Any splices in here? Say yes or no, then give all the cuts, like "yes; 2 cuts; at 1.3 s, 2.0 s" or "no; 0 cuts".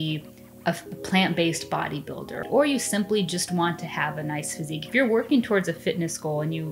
yes; 1 cut; at 2.4 s